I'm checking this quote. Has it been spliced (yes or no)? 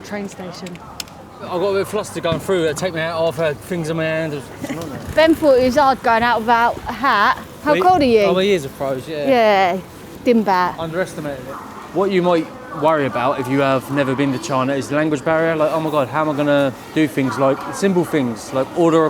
yes